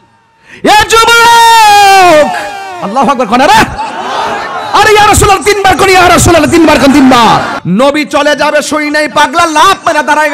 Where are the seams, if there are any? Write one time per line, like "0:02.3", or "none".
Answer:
0:07.5